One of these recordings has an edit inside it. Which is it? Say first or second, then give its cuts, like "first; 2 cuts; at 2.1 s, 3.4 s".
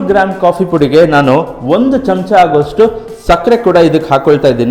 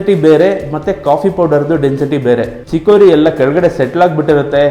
second; 1 cut; at 2.6 s